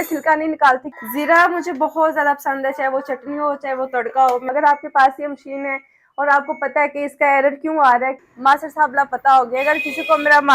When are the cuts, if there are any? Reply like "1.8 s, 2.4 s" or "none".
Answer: 0.9 s, 4.5 s, 8.2 s